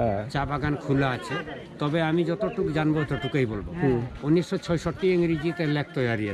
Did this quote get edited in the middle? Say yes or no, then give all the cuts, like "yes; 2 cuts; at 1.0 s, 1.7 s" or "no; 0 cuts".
no; 0 cuts